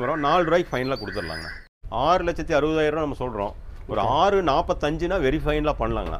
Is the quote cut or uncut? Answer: cut